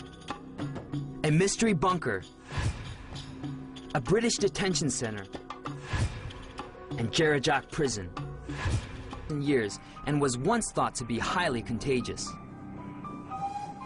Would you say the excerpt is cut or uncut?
uncut